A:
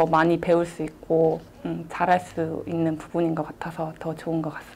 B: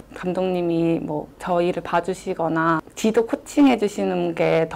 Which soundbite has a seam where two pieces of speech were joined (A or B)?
B